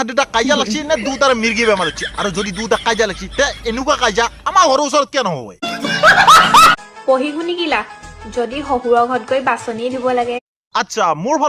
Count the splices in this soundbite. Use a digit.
1